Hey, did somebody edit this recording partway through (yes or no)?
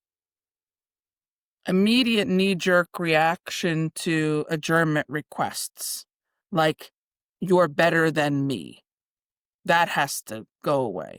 no